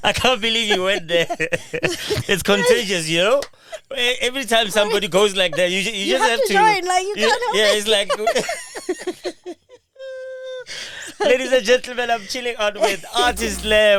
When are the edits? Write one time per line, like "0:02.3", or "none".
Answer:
none